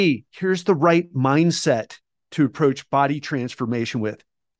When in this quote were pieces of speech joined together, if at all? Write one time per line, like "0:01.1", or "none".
none